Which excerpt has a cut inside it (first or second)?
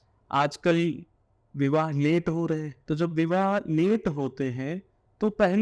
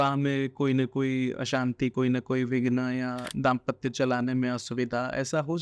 first